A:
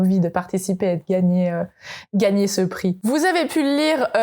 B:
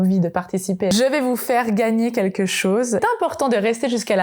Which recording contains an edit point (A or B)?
B